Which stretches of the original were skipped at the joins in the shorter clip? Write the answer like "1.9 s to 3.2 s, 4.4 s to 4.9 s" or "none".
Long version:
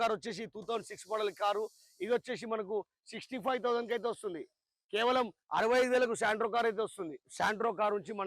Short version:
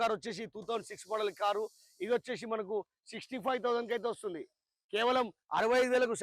none